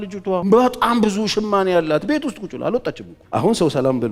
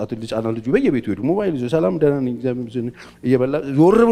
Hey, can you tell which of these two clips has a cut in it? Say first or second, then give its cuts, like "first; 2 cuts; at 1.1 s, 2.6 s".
first; 1 cut; at 3.1 s